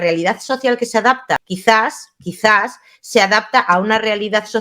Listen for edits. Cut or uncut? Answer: cut